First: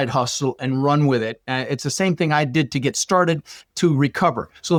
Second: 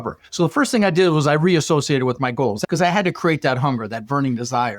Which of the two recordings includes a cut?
second; 1 cut; at 2.6 s

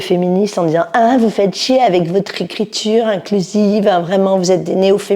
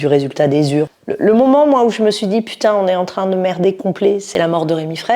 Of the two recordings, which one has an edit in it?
second; 2 cuts; at 1.0 s, 4.2 s

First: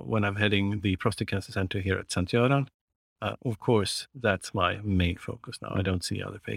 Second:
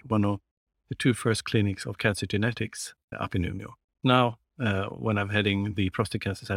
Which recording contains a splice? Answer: second; 2 cuts; at 3.1 s, 4.0 s

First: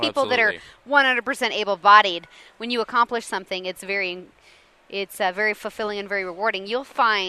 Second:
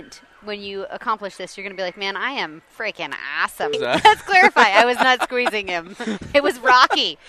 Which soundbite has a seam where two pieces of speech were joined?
second; 1 cut; at 3.8 s

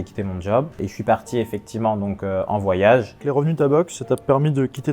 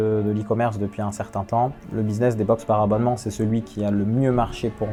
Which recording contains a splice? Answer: first; 2 cuts; at 0.8 s, 3.3 s

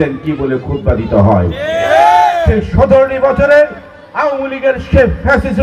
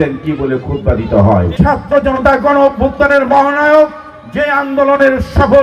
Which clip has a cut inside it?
second; 1 cut; at 1.5 s

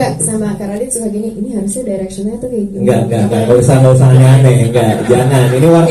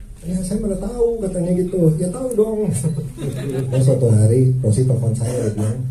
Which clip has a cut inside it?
second; 1 cut; at 3.8 s

